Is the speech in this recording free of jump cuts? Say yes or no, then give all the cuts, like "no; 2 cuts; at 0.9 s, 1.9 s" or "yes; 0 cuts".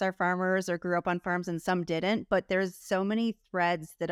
yes; 0 cuts